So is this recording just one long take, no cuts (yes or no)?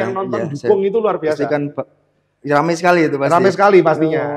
yes